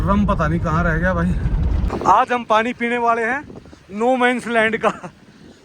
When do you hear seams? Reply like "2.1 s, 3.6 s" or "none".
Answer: 1.8 s